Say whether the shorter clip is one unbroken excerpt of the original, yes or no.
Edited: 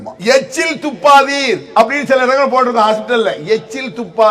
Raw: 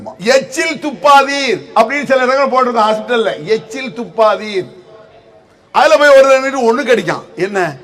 yes